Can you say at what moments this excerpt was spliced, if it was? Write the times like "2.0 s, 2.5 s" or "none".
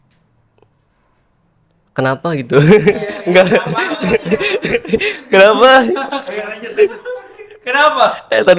none